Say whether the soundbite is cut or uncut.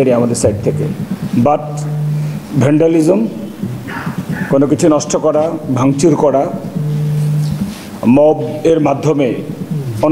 uncut